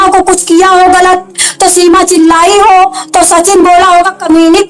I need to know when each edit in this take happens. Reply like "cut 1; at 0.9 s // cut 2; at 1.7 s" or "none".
none